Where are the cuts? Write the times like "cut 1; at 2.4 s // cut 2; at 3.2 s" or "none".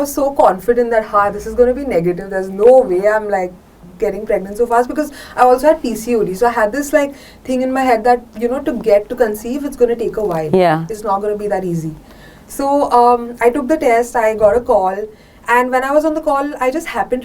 none